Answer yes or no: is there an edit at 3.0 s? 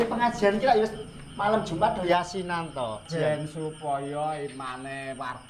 yes